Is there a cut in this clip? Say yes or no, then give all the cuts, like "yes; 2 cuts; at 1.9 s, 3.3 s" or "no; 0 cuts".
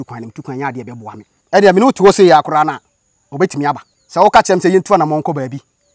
yes; 2 cuts; at 1.3 s, 3.9 s